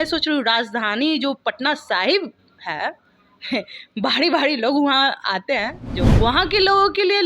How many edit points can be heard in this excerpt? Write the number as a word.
one